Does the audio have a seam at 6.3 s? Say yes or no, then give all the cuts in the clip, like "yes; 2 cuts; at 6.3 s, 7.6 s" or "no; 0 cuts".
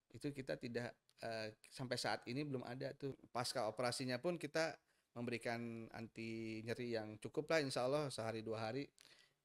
no; 1 cut; at 3.2 s